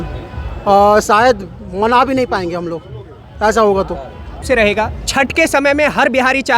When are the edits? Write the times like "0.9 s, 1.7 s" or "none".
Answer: 4.4 s